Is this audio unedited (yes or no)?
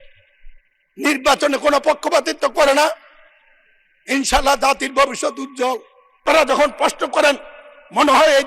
no